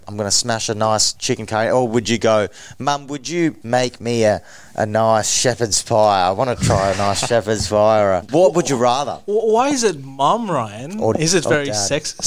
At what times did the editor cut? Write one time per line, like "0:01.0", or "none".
0:01.1
0:03.6
0:08.2